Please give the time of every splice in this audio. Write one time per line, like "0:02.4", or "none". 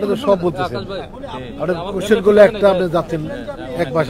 none